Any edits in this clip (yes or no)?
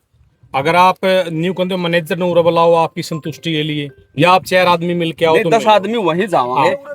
no